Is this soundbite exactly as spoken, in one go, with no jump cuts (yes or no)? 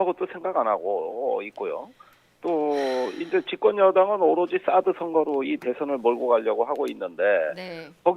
no